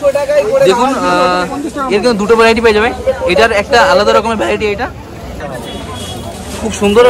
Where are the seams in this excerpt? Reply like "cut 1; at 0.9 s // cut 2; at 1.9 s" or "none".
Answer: cut 1; at 5.4 s

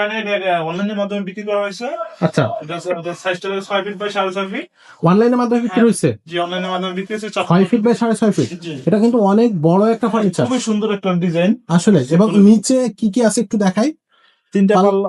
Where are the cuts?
none

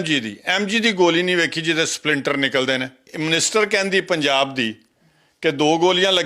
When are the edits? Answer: cut 1; at 3.1 s

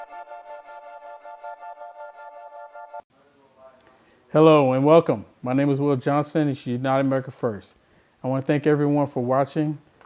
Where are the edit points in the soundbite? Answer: cut 1; at 1.4 s // cut 2; at 3.0 s

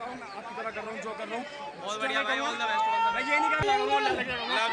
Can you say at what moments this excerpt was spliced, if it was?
cut 1; at 3.6 s

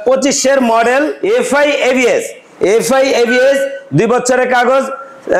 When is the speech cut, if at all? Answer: cut 1; at 1.2 s

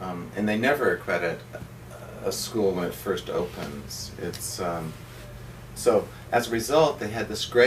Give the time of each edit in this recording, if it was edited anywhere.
cut 1; at 2.1 s

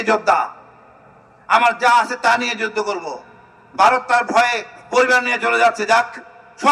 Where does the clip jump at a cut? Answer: none

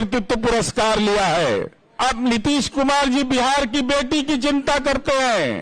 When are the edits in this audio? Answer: cut 1; at 2.0 s

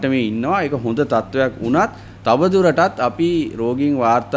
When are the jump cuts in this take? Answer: none

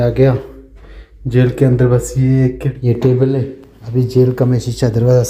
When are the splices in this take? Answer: cut 1; at 2.7 s

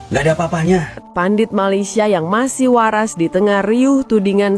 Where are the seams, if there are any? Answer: cut 1; at 1.0 s

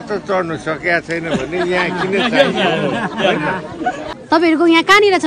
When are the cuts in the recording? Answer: cut 1; at 4.1 s

